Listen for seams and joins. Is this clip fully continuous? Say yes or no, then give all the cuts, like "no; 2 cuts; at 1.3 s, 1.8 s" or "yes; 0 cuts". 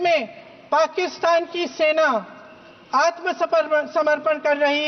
yes; 0 cuts